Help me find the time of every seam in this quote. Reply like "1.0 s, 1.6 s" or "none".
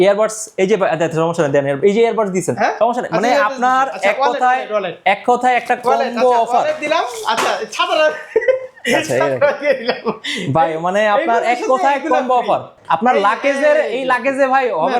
12.7 s